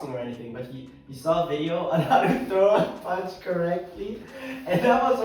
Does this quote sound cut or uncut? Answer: uncut